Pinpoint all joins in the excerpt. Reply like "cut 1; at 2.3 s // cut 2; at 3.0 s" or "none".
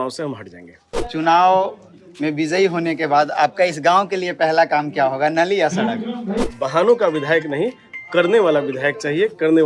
cut 1; at 1.0 s // cut 2; at 6.5 s